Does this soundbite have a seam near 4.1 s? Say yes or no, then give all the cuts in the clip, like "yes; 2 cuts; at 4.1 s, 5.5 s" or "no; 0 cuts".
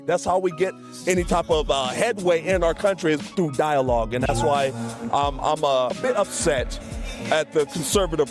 yes; 2 cuts; at 4.1 s, 6.0 s